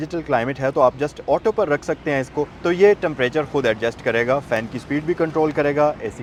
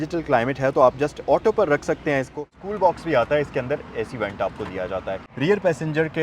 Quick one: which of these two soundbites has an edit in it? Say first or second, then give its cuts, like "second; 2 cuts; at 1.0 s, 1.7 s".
second; 2 cuts; at 2.5 s, 5.2 s